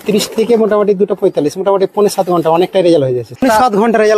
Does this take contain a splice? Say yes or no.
yes